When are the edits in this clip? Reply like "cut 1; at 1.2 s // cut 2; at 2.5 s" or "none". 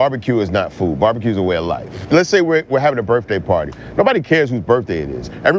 cut 1; at 1.9 s